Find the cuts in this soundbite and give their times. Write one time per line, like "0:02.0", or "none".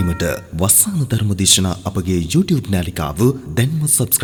none